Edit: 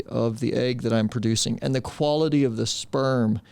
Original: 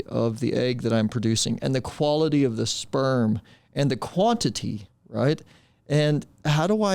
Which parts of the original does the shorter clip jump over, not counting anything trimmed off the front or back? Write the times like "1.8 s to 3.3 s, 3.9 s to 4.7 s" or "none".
none